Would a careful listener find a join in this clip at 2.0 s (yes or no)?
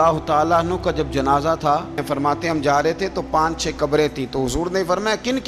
yes